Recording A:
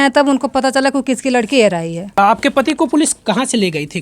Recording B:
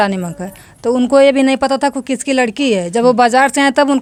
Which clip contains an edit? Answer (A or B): A